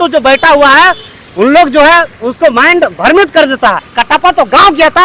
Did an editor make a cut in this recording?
yes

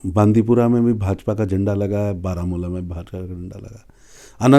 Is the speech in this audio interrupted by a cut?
no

